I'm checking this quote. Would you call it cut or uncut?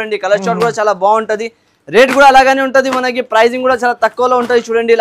uncut